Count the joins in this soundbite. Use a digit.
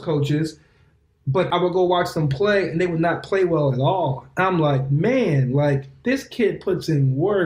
1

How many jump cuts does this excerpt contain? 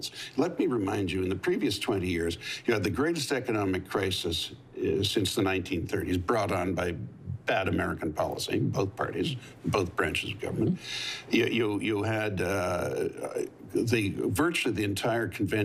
0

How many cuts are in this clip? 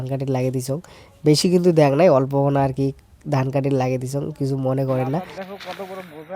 1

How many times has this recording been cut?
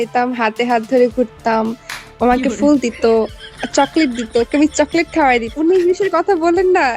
1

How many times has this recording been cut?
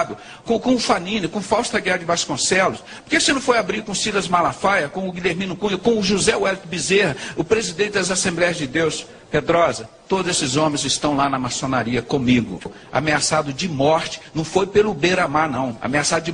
1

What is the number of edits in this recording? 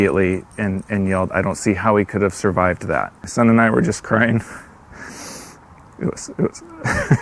1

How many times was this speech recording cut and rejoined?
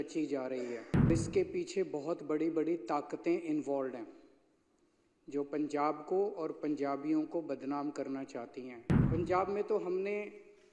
2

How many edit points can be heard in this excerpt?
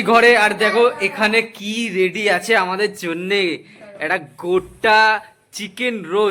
0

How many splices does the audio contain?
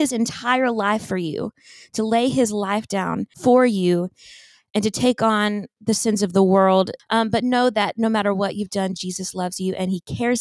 2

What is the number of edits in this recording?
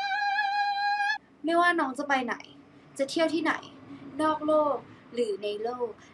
1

